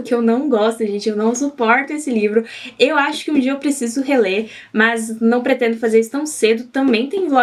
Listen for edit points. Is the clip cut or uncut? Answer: uncut